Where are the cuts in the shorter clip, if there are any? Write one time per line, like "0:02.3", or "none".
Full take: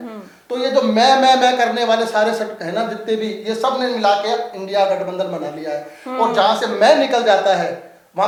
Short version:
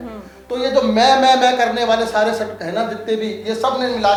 none